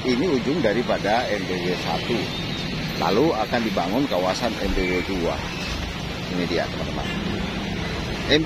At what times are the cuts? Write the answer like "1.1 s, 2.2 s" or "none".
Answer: none